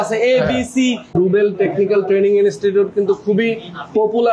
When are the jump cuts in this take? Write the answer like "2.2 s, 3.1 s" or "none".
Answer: 1.1 s

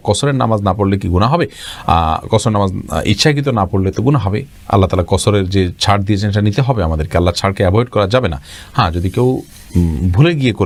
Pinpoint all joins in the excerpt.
none

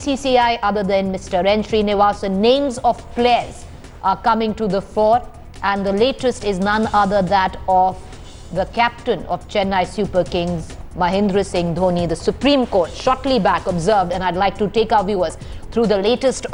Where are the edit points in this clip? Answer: none

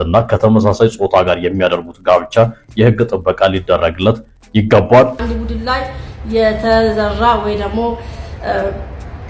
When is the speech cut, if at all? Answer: 5.2 s

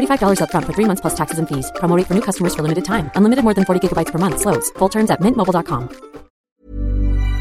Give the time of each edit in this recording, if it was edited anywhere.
6.4 s

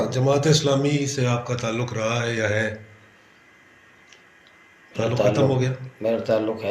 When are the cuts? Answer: none

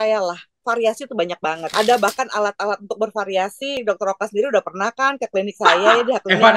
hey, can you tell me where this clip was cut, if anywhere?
1.7 s, 3.8 s

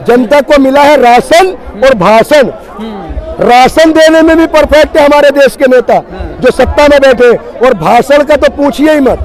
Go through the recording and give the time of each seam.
none

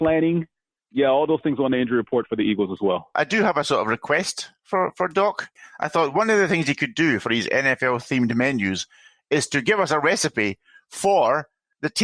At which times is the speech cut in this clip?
3.1 s, 5.5 s

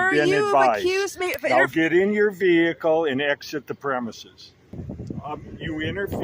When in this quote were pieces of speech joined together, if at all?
4.9 s

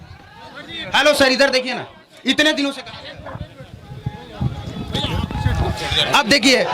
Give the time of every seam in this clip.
none

